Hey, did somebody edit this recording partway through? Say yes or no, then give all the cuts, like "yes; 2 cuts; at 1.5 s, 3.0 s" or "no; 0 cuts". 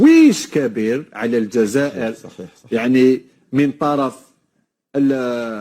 no; 0 cuts